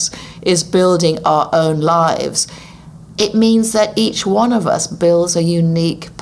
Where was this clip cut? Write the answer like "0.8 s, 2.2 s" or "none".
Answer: none